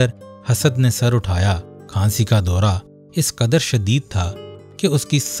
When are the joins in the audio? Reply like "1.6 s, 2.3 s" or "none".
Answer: 1.8 s